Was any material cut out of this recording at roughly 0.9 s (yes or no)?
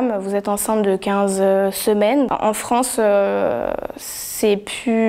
no